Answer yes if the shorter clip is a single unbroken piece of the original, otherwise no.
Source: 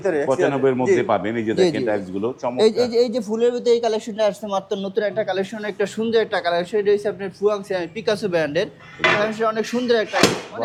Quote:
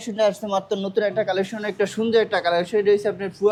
yes